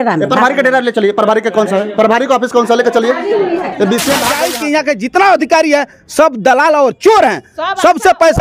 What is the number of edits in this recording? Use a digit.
1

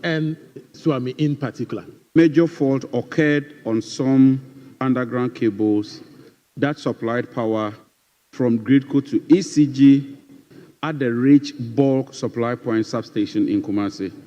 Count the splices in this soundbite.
1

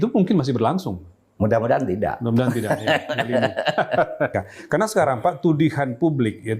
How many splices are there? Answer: 1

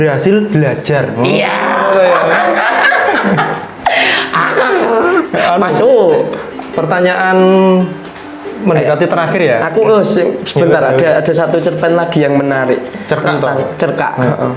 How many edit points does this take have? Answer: 0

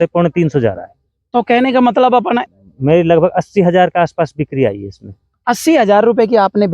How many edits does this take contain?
1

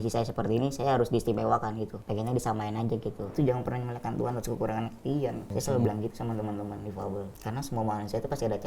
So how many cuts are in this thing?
4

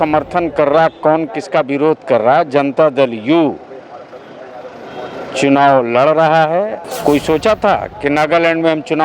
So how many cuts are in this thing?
1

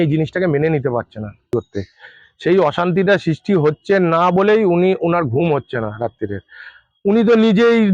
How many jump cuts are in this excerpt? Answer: 1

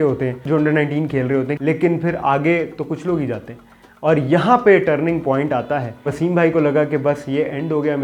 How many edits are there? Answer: 1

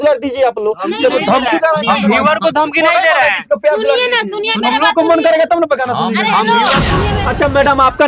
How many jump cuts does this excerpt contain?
1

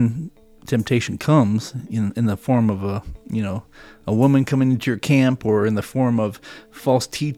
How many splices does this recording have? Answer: 0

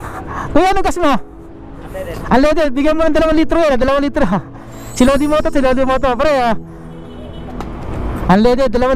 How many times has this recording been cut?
1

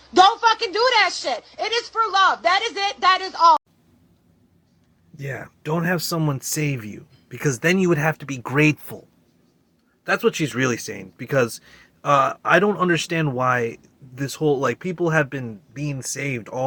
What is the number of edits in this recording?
0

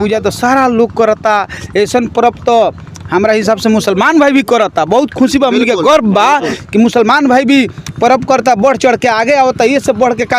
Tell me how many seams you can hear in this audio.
0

